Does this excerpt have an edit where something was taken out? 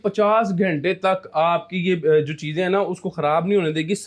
no; 0 cuts

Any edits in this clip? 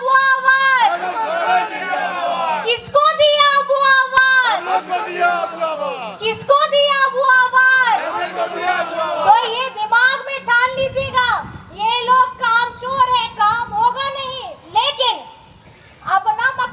no; 0 cuts

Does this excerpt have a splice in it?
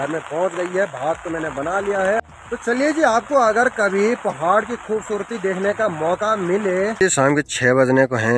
yes; 2 cuts; at 2.2 s, 7.0 s

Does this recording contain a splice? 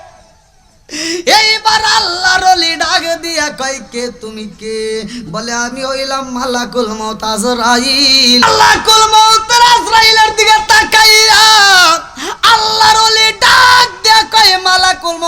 yes; 1 cut; at 8.4 s

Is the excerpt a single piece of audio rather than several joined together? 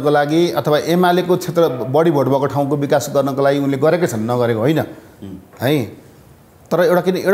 yes; 0 cuts

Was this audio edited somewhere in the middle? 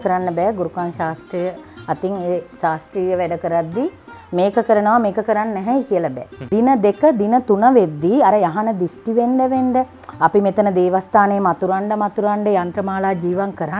yes; 1 cut; at 6.3 s

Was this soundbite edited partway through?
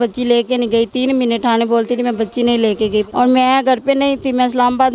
yes; 1 cut; at 3.1 s

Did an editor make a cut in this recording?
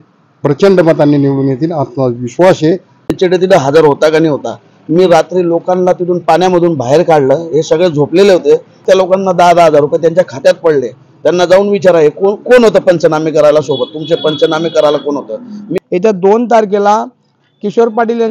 yes; 3 cuts; at 3.1 s, 8.8 s, 15.6 s

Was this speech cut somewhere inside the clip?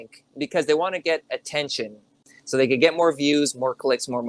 yes; 1 cut; at 2.3 s

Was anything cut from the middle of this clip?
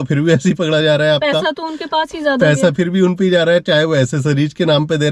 no; 0 cuts

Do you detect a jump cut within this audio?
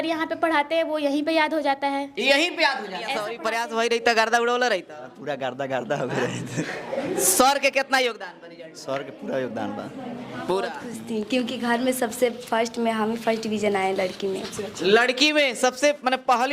yes; 2 cuts; at 3.3 s, 10.9 s

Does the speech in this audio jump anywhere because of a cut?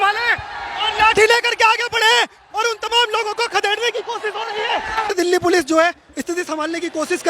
yes; 1 cut; at 5.1 s

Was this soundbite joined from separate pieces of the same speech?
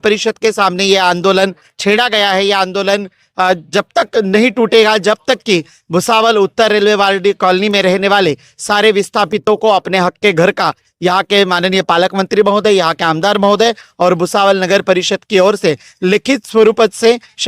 no; 0 cuts

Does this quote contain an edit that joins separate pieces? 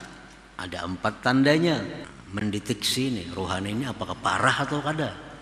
yes; 1 cut; at 2.1 s

